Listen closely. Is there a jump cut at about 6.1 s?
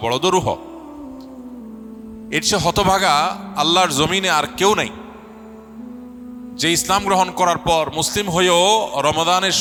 no; 0 cuts

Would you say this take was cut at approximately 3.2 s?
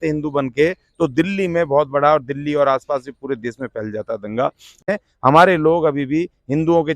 no; 1 cut; at 4.7 s

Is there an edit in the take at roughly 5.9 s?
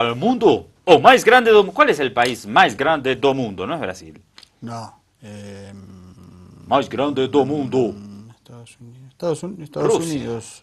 no; 1 cut; at 1.2 s

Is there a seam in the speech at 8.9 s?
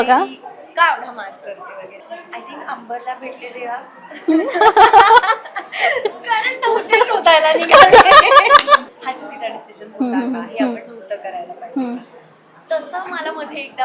yes; 2 cuts; at 1.9 s, 8.9 s

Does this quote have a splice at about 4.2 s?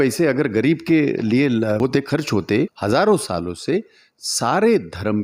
no; 2 cuts; at 1.8 s, 2.8 s

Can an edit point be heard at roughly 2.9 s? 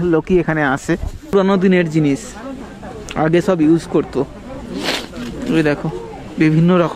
no; 1 cut; at 1.3 s

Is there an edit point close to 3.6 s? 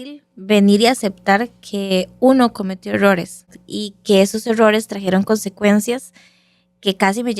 yes; 1 cut; at 3.6 s

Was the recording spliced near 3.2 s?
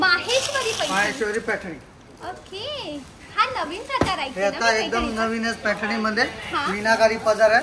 no; 0 cuts

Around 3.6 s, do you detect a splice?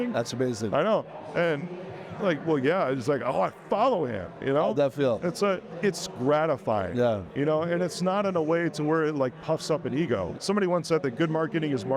no; 2 cuts; at 5.7 s, 10.3 s

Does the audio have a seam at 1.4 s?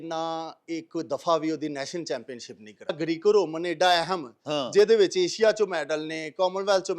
no; 1 cut; at 2.9 s

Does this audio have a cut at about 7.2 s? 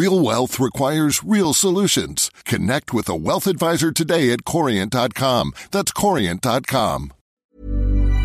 yes; 1 cut; at 7.2 s

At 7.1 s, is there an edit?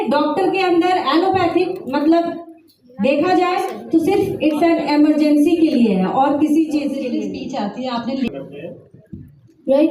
yes; 1 cut; at 7.1 s

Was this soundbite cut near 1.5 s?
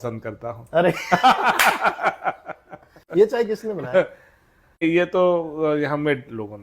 no; 1 cut; at 2.9 s

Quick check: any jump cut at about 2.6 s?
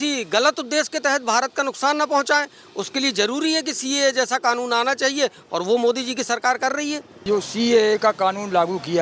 no; 1 cut; at 7.2 s

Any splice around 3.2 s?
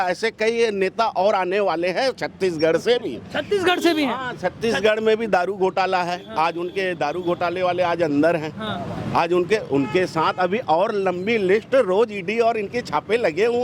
no; 0 cuts

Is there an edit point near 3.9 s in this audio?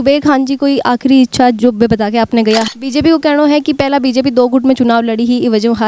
no; 1 cut; at 2.6 s

